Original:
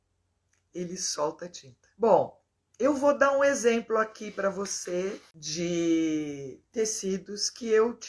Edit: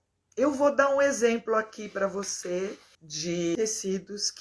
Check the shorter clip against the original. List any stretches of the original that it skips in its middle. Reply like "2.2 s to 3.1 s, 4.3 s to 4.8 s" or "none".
5.5 s to 6.3 s